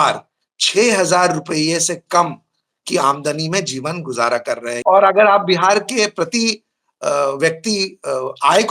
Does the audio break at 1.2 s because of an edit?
no; 1 cut; at 4.8 s

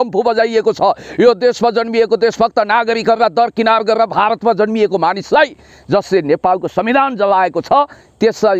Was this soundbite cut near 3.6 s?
no; 0 cuts

